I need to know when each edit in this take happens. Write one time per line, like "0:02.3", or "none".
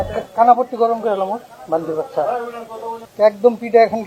0:03.0